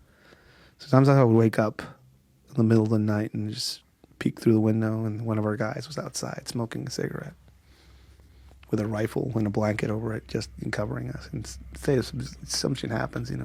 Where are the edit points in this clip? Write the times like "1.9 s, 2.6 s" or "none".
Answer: none